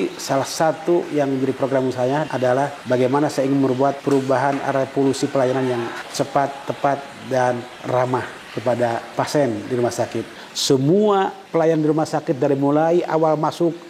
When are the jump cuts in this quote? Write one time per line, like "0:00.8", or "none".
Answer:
0:02.5
0:04.0
0:06.0
0:08.0
0:09.1
0:10.3
0:11.4

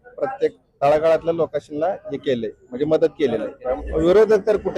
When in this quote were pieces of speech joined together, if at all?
0:03.8

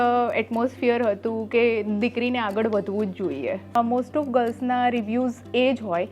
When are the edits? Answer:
0:03.7

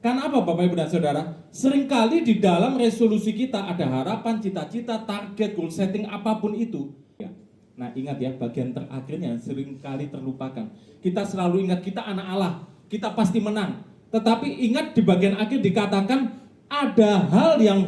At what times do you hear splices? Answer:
0:07.3

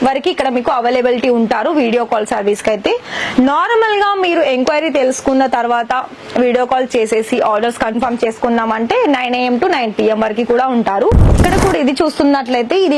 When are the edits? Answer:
0:11.4

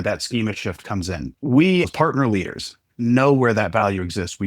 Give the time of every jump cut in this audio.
0:01.3
0:01.9

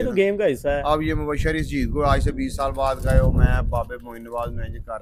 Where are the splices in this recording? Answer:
none

